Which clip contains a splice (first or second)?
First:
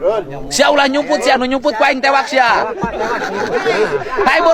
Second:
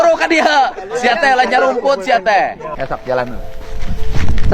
second